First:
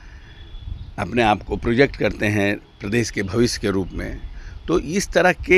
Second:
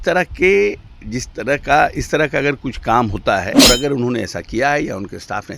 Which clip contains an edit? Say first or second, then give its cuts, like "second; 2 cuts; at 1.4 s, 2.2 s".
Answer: second; 1 cut; at 3.5 s